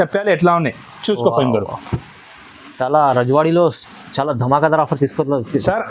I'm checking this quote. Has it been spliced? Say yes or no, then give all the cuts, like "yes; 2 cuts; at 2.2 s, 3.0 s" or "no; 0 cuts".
no; 0 cuts